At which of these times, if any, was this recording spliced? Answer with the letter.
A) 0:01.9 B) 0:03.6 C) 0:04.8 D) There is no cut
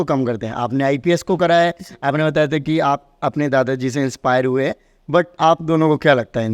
D